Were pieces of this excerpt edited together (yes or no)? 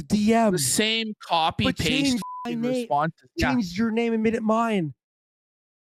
no